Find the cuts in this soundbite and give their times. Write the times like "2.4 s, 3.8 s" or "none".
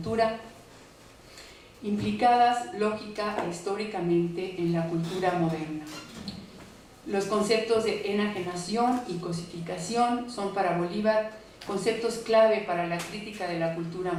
none